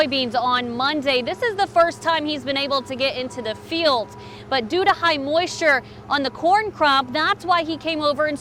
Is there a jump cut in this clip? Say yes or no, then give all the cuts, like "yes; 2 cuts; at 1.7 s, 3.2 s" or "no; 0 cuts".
no; 0 cuts